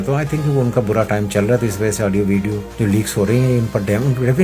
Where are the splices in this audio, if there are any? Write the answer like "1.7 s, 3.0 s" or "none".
2.7 s